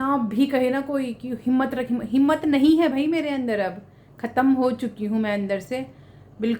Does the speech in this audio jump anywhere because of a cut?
no; 0 cuts

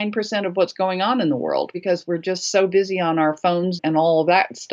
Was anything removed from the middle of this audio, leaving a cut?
yes; 1 cut; at 1.8 s

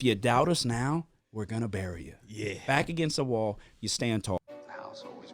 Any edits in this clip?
yes; 1 cut; at 4.4 s

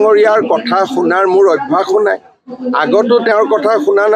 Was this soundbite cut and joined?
no; 0 cuts

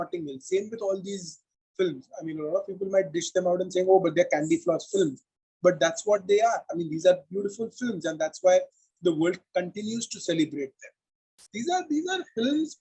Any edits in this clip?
yes; 1 cut; at 11.5 s

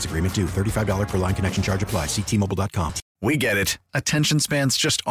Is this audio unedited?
no; 1 cut; at 3.0 s

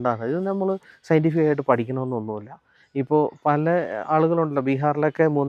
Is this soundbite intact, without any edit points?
yes; 0 cuts

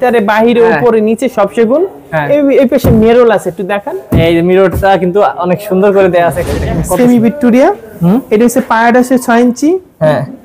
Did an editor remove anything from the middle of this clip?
yes; 1 cut; at 6.5 s

